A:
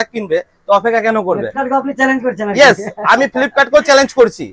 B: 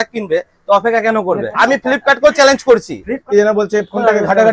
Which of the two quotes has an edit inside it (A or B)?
B